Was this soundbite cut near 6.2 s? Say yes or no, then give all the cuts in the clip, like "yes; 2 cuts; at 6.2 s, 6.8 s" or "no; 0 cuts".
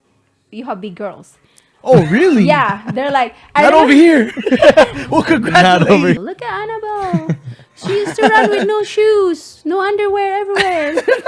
yes; 1 cut; at 6.2 s